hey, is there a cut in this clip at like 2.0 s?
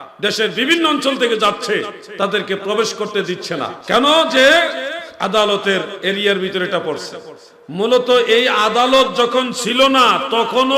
no; 1 cut; at 3.8 s

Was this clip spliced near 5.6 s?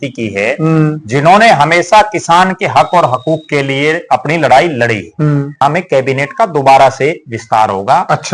yes; 1 cut; at 5.6 s

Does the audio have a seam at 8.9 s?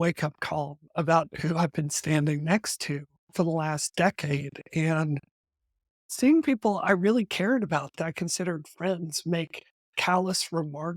no; 1 cut; at 6.0 s

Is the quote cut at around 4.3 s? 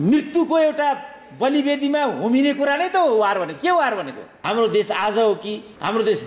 yes; 1 cut; at 4.3 s

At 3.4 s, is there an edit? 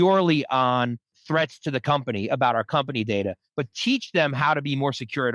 no; 1 cut; at 1.1 s

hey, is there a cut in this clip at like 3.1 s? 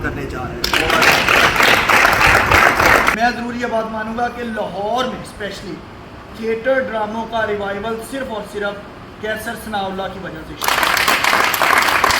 yes; 1 cut; at 3.1 s

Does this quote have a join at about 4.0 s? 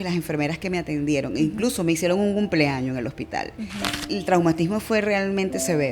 yes; 1 cut; at 4.0 s

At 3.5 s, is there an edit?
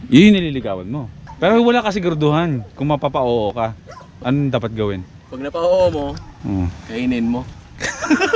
yes; 1 cut; at 3.5 s

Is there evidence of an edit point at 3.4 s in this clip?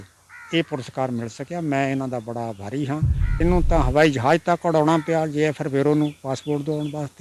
yes; 1 cut; at 3.4 s

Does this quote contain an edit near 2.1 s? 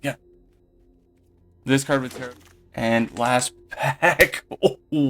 yes; 1 cut; at 2.1 s

